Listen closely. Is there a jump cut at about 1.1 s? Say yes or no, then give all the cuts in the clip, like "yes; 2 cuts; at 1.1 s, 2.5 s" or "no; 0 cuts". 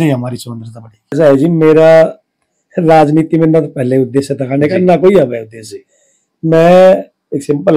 yes; 1 cut; at 1.1 s